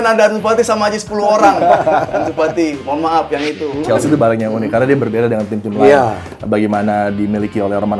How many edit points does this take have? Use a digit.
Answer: 1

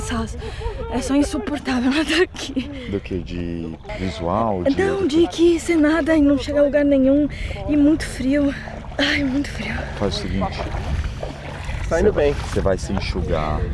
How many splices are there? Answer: 0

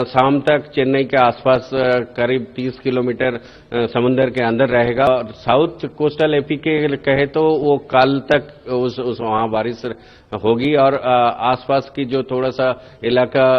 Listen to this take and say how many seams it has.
1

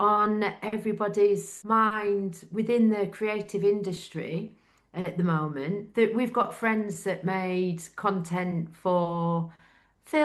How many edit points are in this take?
2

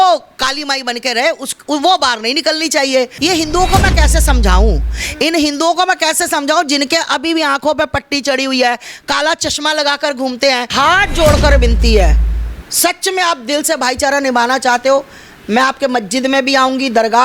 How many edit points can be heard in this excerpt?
2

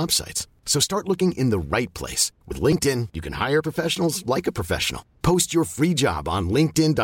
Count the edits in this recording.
0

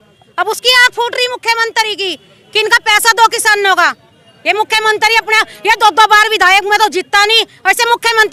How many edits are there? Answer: 0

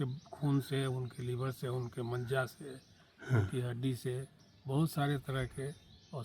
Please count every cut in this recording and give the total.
0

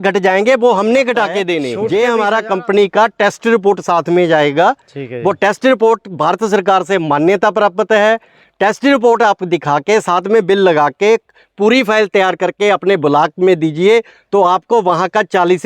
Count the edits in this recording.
1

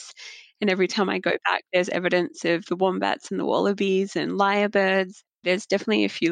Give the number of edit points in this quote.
1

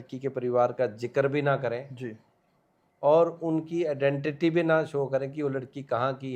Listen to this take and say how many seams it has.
0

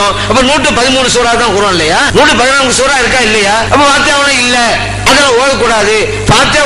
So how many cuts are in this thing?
2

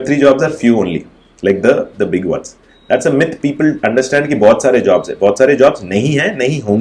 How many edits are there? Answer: 0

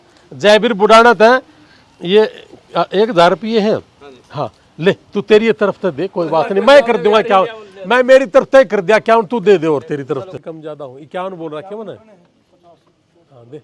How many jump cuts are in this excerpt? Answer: 1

